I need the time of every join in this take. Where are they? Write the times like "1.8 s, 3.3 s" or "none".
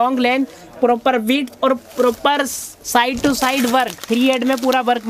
none